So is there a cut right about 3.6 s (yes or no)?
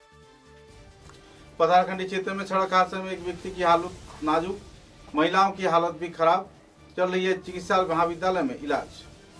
no